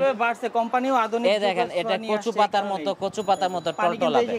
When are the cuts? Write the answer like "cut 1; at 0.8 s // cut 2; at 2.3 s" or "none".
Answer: none